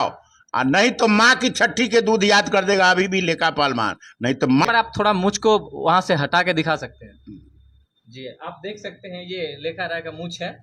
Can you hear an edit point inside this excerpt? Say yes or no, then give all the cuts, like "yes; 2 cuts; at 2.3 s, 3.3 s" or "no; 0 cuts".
yes; 1 cut; at 4.6 s